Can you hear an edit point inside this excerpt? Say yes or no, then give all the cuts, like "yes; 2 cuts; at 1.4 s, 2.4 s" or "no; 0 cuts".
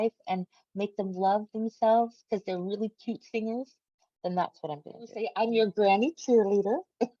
yes; 1 cut; at 5.3 s